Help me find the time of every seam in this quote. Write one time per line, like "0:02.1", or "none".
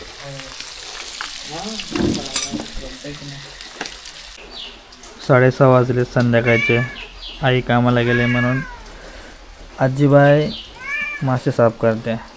0:04.4